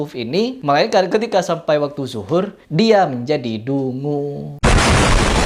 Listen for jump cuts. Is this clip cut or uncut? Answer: uncut